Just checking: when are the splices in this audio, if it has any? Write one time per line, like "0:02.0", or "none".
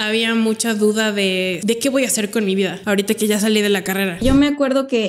0:01.6
0:02.8
0:04.2